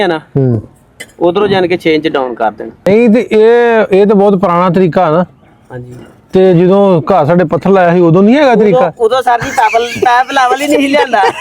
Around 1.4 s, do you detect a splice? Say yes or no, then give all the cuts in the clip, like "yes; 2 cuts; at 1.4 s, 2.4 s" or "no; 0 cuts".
no; 1 cut; at 2.9 s